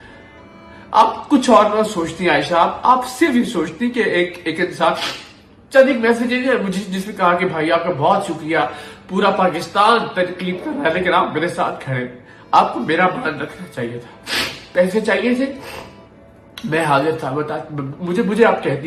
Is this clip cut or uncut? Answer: uncut